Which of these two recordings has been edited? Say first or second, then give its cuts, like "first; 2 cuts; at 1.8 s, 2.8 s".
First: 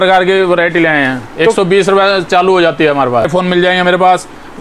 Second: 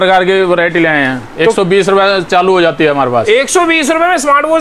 first; 1 cut; at 3.2 s